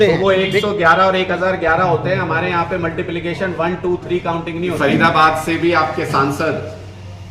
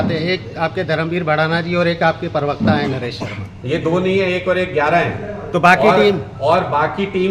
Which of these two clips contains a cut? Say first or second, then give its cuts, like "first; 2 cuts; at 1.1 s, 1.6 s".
first; 1 cut; at 4.8 s